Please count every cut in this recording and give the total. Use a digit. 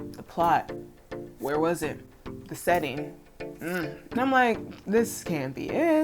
1